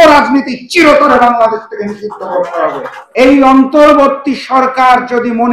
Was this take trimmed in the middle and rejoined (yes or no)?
yes